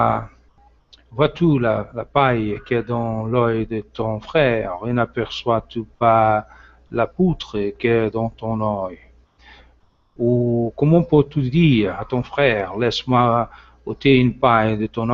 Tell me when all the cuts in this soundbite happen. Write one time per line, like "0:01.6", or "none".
0:04.4